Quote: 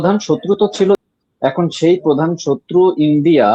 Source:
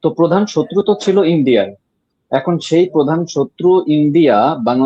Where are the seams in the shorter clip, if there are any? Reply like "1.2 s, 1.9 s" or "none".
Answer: 1.0 s